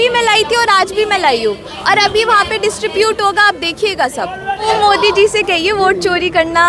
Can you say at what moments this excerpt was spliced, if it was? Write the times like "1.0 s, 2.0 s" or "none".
4.6 s

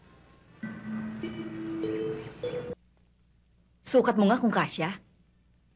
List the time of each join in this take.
2.7 s

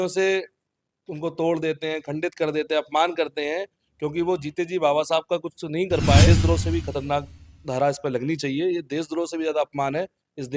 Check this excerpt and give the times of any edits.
6.3 s

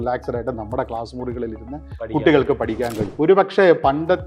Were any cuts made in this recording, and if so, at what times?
3.0 s

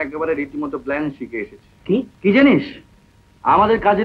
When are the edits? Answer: 2.1 s

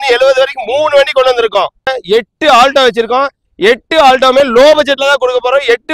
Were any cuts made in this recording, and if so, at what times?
1.9 s

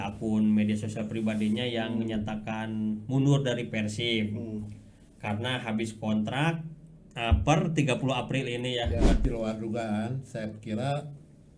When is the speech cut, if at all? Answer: 9.2 s

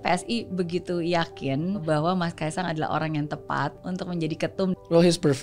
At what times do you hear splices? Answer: 1.8 s, 3.8 s, 4.7 s

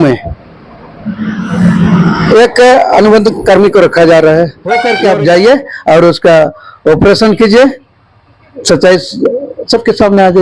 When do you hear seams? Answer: 4.9 s

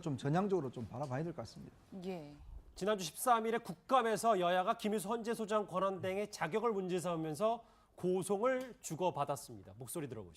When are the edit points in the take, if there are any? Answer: 5.5 s

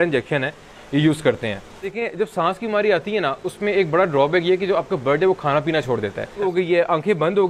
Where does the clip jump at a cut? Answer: 2.0 s, 6.4 s

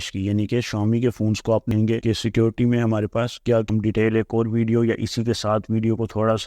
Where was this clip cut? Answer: 1.7 s, 3.7 s

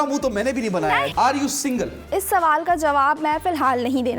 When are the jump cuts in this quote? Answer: 1.1 s

